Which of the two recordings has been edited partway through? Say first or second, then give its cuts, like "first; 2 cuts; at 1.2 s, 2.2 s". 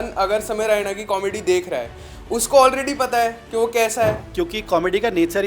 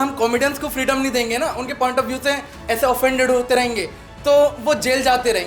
first; 1 cut; at 4.2 s